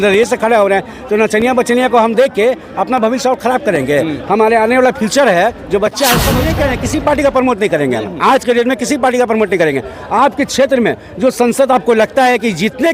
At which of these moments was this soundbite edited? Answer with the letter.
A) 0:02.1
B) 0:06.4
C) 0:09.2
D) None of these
B